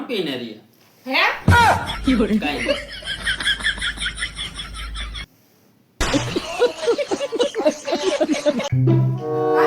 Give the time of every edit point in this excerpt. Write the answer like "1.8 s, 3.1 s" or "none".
8.7 s